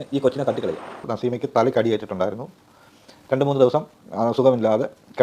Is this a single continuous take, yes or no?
no